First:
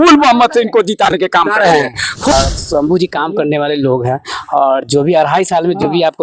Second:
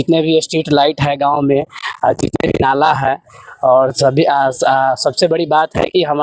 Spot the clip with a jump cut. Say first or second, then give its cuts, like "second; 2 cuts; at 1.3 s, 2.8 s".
first; 1 cut; at 2.3 s